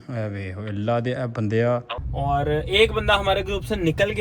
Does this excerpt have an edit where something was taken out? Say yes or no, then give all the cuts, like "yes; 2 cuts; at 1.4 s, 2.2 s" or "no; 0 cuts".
yes; 1 cut; at 2.0 s